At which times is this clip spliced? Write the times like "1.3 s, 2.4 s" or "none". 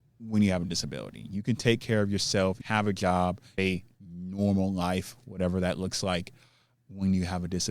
2.6 s, 3.6 s